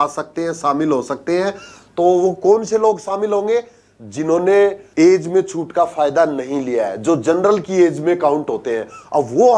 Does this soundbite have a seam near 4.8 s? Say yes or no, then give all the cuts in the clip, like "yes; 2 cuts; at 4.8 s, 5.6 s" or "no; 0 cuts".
yes; 1 cut; at 4.8 s